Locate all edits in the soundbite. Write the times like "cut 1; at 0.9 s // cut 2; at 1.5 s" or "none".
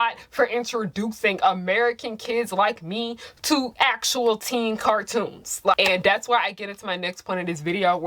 cut 1; at 5.8 s